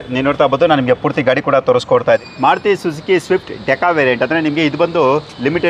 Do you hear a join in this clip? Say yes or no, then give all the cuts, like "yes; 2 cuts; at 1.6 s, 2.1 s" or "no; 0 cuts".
yes; 1 cut; at 2.2 s